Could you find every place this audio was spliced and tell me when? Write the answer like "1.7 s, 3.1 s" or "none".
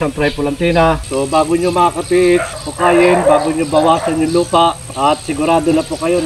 1.1 s, 2.5 s, 4.9 s